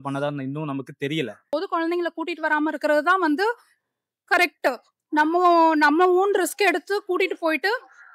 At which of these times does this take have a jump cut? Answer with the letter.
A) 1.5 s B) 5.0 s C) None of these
A